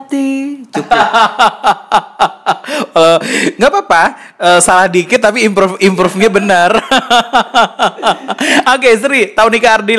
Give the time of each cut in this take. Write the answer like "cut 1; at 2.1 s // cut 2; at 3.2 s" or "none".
none